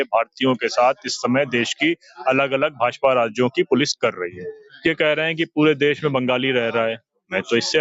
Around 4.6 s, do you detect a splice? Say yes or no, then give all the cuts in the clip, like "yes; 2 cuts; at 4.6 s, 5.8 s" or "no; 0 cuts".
yes; 1 cut; at 4.6 s